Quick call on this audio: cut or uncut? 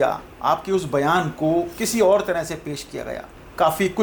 uncut